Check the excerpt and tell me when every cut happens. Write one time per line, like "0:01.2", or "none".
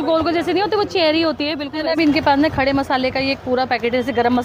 0:01.6